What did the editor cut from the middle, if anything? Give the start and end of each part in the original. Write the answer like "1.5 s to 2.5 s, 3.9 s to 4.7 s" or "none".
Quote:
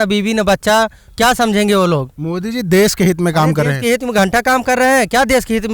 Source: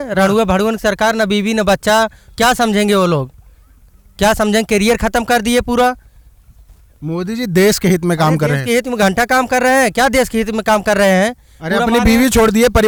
3.4 s to 7.0 s